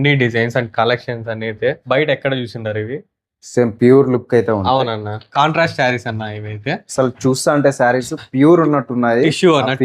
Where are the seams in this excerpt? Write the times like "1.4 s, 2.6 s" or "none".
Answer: 1.8 s, 5.3 s